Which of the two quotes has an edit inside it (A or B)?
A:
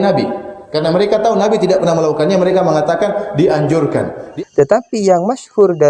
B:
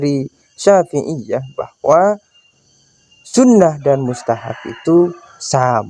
A